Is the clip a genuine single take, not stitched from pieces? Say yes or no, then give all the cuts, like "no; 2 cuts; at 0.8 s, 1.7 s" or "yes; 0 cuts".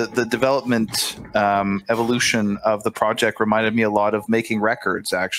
yes; 0 cuts